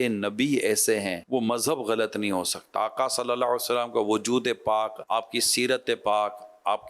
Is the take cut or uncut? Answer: cut